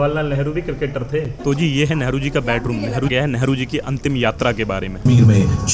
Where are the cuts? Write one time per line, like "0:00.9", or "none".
0:01.3
0:03.1
0:05.0